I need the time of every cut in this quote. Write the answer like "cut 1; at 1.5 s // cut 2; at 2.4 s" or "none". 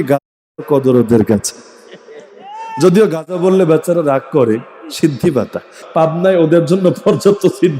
cut 1; at 5.8 s